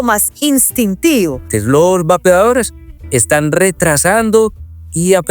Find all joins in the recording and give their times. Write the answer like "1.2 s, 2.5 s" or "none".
1.5 s